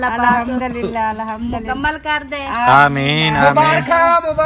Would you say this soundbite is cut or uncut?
uncut